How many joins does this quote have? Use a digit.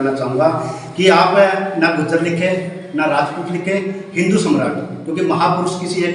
0